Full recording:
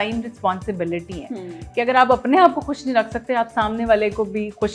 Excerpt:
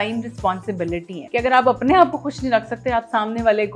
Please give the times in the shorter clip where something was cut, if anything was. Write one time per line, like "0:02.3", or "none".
0:01.2